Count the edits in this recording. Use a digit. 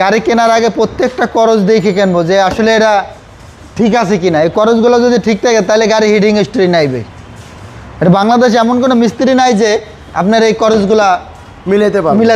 0